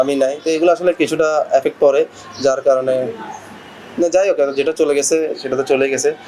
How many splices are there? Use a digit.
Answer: 0